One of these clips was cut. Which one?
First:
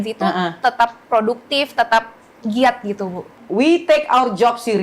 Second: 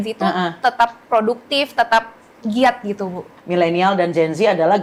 first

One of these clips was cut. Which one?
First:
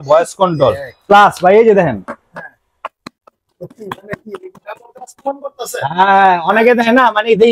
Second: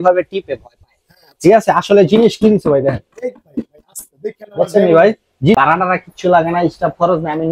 second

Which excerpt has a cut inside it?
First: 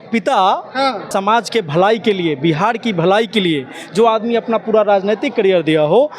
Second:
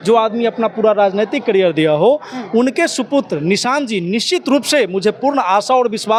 first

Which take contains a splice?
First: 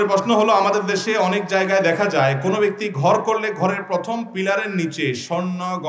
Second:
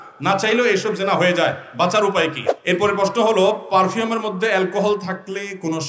second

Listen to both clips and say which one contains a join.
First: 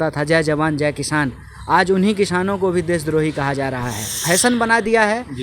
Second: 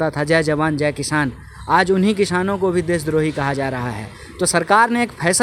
first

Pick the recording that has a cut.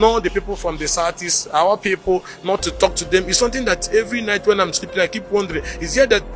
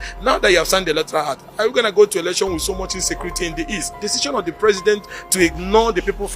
second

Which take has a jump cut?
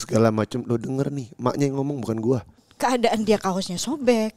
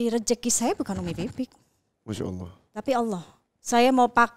first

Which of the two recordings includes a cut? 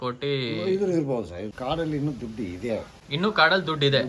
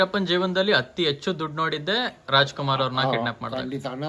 first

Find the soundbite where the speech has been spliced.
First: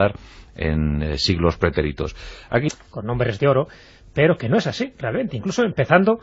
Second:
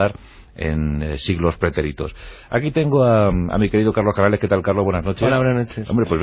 second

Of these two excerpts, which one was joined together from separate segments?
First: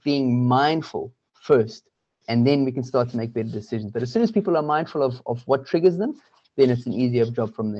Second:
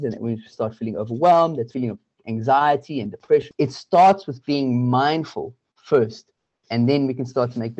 second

